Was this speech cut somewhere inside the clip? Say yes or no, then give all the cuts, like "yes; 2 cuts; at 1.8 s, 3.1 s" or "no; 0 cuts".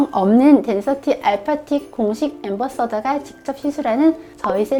no; 0 cuts